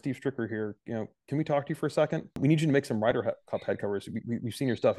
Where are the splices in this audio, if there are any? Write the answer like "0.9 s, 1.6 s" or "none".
2.4 s